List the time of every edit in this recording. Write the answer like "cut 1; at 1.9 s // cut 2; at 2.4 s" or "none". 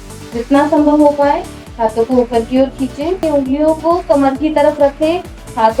cut 1; at 3.3 s